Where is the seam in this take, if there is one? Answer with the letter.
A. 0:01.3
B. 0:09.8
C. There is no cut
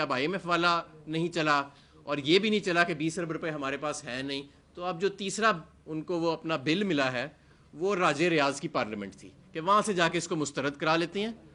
C